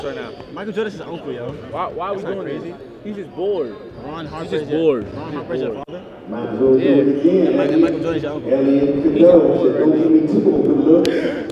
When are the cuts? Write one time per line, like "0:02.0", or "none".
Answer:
none